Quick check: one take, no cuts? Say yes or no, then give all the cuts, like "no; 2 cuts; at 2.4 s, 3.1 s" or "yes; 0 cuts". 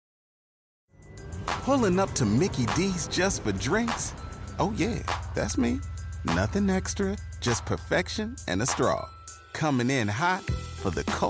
yes; 0 cuts